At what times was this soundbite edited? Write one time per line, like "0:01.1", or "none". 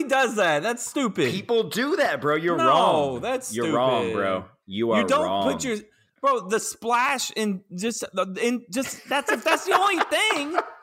0:04.9